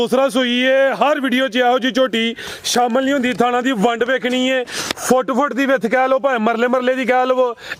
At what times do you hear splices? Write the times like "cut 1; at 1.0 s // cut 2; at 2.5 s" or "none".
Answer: none